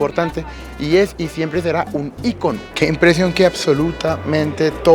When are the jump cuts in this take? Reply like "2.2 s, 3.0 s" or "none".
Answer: 2.7 s